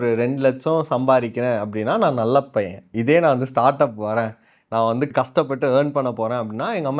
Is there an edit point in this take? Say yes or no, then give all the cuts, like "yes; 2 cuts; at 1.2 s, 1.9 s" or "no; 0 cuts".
no; 0 cuts